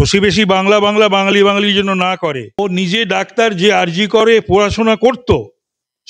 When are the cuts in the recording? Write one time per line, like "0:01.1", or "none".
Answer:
0:02.6